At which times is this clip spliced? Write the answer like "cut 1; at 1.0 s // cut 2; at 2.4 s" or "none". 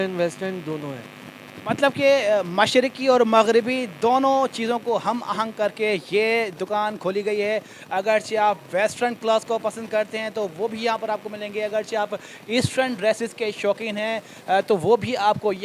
none